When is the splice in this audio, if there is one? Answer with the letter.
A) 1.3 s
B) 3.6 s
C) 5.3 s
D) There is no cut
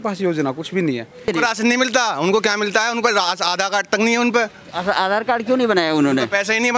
A